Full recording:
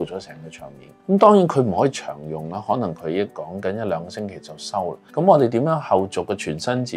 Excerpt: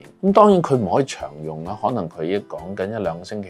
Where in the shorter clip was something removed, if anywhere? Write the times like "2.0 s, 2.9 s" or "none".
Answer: none